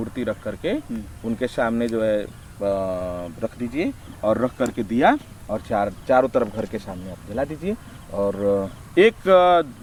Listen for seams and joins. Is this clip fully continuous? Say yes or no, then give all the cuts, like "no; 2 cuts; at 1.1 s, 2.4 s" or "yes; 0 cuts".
yes; 0 cuts